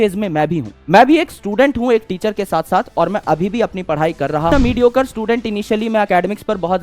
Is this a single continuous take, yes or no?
no